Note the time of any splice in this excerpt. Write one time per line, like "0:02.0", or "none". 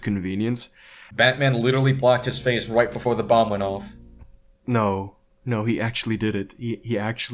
0:01.1